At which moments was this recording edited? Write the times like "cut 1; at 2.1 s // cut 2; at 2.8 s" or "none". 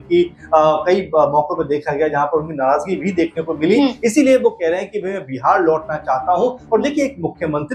none